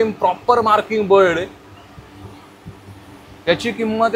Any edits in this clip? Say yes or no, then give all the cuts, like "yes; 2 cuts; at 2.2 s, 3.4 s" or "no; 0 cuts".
no; 0 cuts